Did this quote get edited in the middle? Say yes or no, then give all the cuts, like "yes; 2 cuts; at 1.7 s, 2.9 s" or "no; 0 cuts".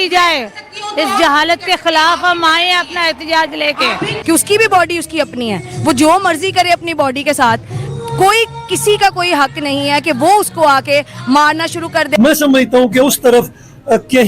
yes; 2 cuts; at 4.0 s, 12.1 s